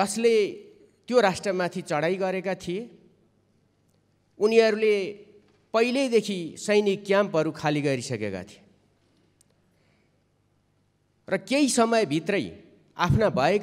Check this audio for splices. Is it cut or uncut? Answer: uncut